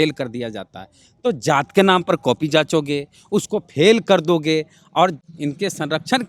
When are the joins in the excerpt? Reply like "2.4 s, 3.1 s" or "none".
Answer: 5.3 s

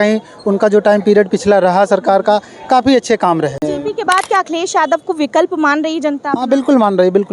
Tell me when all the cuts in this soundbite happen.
3.7 s

